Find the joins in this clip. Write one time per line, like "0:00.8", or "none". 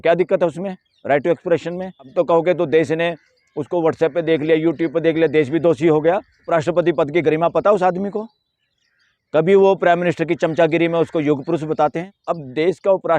0:02.1
0:06.4
0:12.1